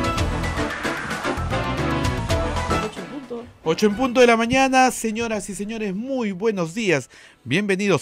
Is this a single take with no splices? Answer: no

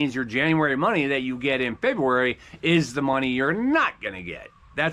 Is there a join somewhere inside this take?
no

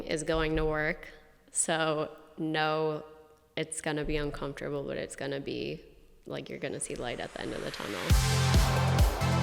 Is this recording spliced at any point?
yes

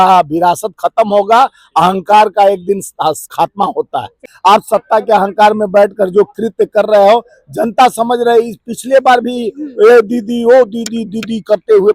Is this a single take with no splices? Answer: no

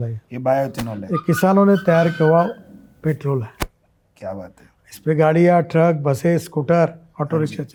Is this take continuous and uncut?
yes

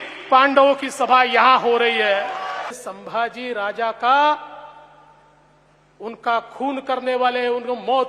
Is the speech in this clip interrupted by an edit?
yes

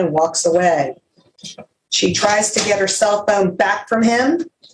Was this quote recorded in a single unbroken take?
yes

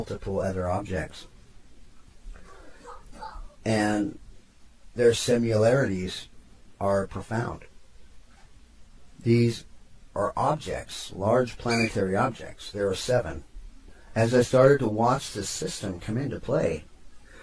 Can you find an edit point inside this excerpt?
yes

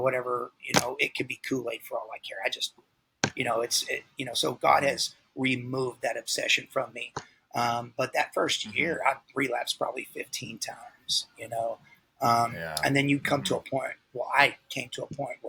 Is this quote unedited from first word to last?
yes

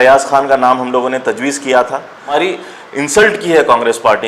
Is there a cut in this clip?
yes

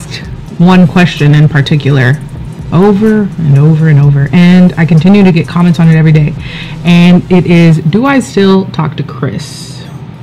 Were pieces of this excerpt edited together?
no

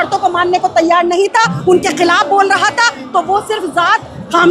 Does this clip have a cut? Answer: no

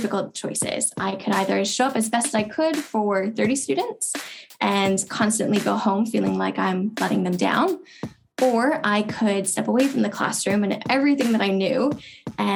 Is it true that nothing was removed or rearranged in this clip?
yes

